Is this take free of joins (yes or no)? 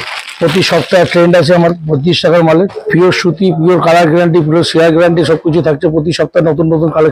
no